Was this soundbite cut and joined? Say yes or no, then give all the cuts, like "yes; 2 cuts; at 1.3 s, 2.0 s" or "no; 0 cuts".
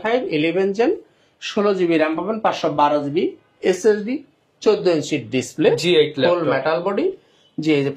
no; 0 cuts